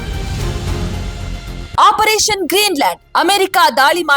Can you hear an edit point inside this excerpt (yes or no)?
yes